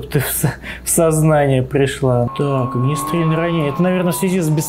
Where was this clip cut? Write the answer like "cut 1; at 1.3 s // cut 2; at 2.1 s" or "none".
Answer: cut 1; at 2.3 s